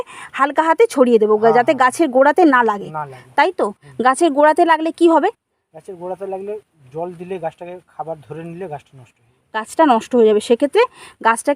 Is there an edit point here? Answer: no; 0 cuts

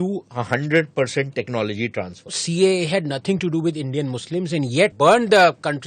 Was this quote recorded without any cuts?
no; 2 cuts; at 2.4 s, 4.9 s

